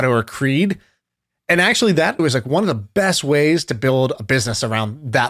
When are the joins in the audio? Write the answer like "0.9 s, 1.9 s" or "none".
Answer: 2.2 s